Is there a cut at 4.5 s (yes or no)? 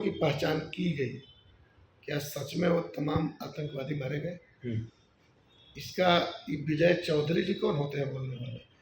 no